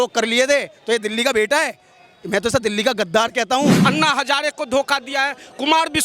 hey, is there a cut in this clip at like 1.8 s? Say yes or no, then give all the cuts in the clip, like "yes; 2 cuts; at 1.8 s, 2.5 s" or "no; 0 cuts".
no; 1 cut; at 3.8 s